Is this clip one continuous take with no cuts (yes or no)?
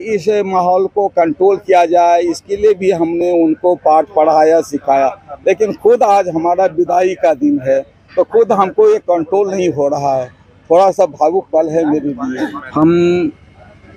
no